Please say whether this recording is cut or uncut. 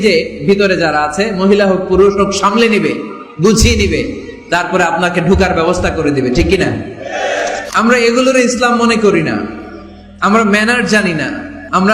cut